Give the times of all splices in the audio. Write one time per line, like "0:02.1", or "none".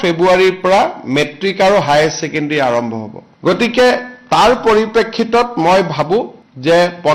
none